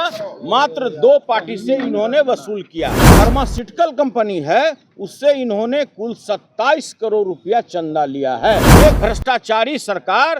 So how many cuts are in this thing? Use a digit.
2